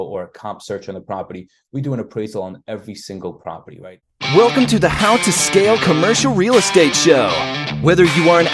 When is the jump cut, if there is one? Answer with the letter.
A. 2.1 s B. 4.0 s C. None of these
B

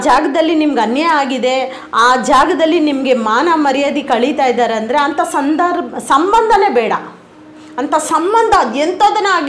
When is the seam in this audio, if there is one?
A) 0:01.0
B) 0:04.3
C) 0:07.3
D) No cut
D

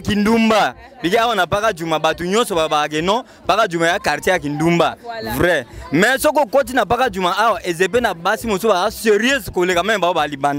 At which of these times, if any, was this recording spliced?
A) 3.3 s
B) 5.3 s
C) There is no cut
C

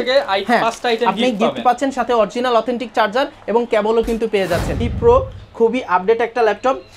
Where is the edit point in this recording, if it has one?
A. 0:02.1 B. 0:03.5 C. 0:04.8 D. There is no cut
C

